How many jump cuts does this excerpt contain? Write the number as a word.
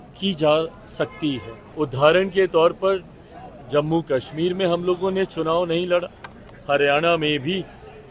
one